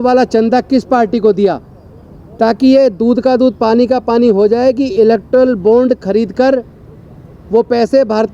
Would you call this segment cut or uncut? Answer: uncut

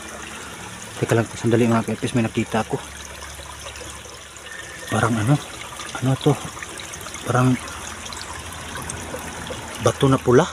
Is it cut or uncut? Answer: cut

